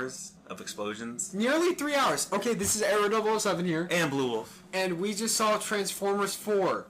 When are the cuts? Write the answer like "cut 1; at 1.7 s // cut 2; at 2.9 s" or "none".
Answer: cut 1; at 2.5 s